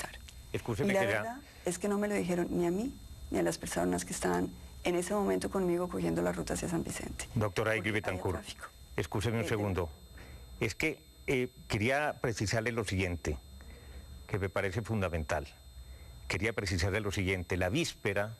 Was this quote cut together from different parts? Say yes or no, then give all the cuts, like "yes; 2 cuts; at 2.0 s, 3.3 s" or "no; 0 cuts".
yes; 1 cut; at 16.2 s